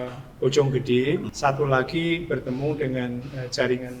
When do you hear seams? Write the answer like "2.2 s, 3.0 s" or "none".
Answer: 1.3 s